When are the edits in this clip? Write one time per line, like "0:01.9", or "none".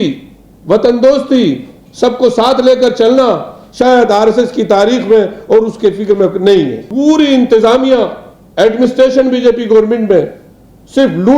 0:06.8